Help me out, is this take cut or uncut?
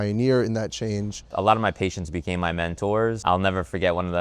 cut